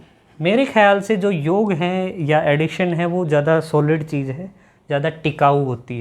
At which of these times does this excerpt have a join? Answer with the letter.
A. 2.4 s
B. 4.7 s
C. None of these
C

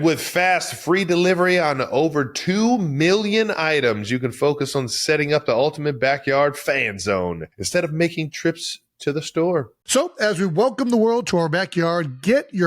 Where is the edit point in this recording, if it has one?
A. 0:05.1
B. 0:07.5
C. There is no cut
B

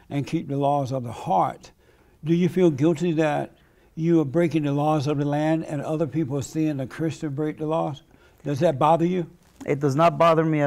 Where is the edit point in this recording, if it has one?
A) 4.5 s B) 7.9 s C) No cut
C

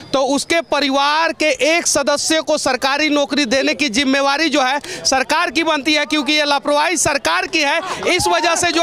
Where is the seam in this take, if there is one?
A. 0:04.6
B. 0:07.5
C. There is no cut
C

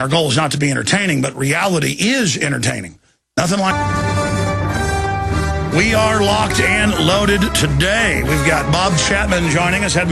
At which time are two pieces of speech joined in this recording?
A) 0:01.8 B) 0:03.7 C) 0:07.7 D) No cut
D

